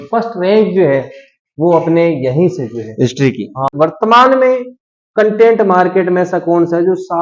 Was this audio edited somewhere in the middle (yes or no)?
yes